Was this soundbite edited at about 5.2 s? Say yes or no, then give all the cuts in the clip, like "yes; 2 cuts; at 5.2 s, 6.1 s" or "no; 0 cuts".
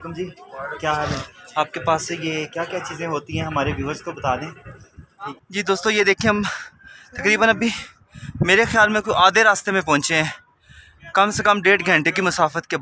yes; 1 cut; at 5.2 s